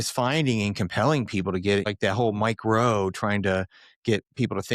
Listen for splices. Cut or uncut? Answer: cut